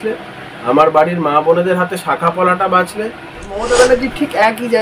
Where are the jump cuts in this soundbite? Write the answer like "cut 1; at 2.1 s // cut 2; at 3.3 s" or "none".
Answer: cut 1; at 3.5 s